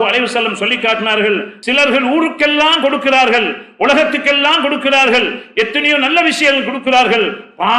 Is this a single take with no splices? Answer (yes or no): no